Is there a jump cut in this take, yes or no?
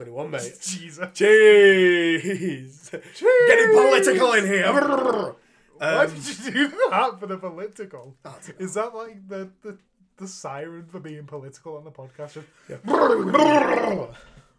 no